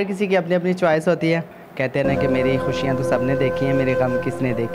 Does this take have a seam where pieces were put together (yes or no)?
yes